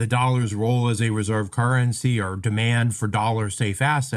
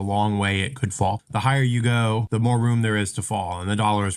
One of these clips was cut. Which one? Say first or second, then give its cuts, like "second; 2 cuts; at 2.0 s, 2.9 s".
second; 2 cuts; at 1.2 s, 2.3 s